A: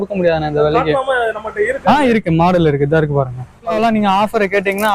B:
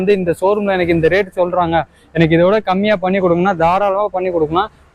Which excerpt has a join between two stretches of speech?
A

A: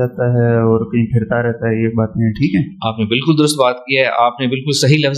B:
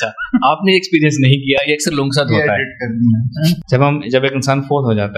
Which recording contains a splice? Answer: B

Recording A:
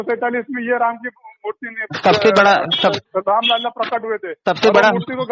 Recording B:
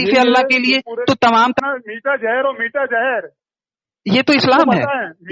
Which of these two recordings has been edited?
B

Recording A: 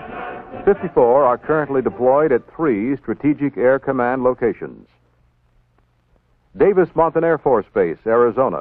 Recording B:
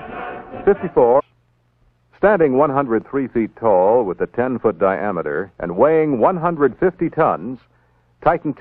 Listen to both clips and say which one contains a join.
A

